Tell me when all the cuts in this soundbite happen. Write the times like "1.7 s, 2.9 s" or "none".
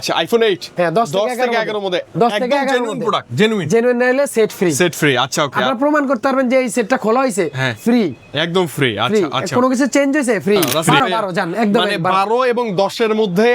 10.8 s